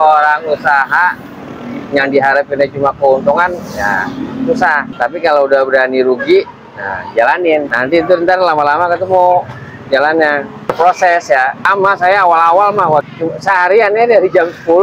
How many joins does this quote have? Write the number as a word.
one